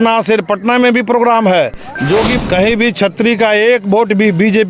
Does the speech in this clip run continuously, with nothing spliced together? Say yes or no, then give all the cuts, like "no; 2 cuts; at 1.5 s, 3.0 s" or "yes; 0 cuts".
no; 1 cut; at 2.3 s